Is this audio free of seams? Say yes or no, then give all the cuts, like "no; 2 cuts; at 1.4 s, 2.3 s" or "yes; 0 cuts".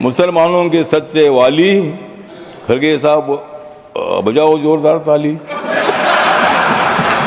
yes; 0 cuts